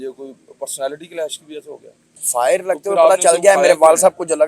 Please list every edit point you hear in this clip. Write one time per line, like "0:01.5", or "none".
0:02.2

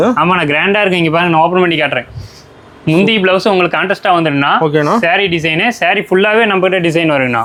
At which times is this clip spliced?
none

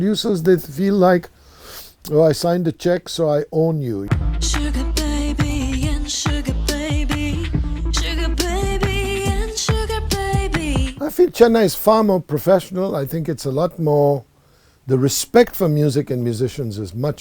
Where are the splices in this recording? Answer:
0:04.1
0:10.9

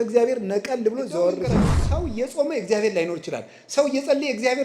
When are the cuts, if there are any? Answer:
0:01.8

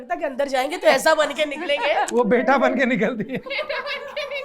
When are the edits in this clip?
0:02.1
0:03.4

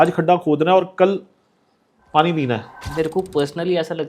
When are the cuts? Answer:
0:02.8

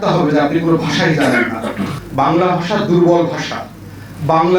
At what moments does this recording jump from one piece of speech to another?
0:02.0

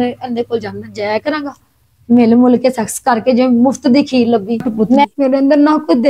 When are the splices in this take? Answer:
0:05.0

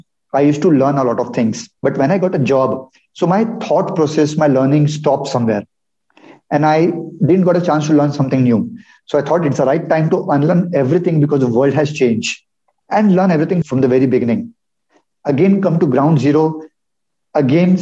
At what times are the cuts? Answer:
0:01.7
0:13.6

